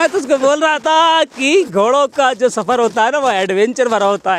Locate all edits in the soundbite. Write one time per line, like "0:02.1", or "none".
none